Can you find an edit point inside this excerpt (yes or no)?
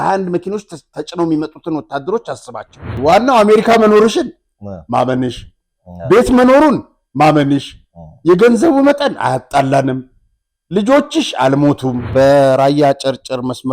yes